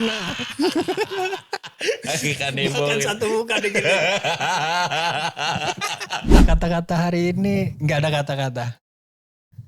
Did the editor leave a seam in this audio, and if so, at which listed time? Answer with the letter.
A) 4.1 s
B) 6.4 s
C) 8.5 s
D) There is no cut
B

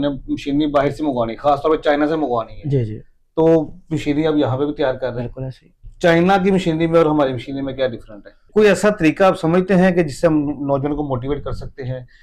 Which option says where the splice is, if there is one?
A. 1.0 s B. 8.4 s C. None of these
B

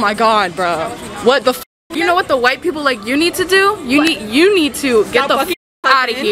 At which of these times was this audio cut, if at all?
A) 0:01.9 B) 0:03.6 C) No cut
A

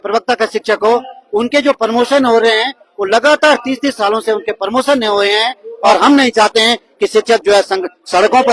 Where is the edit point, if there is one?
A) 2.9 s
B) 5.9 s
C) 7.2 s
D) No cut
B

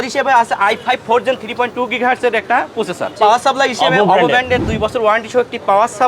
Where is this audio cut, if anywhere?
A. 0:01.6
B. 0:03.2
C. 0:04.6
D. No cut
B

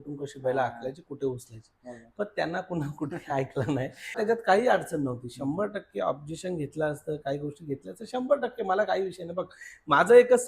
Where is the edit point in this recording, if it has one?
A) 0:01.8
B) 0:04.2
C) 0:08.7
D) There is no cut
B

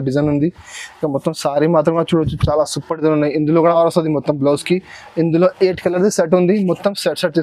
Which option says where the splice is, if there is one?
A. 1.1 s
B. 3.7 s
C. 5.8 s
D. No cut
B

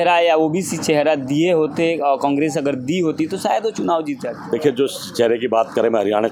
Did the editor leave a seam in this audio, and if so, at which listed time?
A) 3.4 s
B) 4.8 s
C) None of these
C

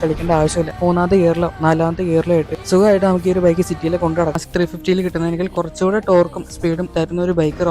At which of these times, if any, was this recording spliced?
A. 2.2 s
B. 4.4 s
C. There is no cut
B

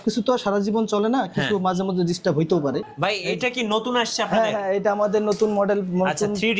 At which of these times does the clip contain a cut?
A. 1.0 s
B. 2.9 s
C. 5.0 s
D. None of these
B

